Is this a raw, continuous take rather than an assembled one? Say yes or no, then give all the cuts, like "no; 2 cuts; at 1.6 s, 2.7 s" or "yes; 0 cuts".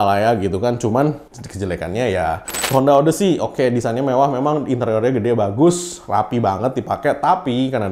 no; 1 cut; at 2.6 s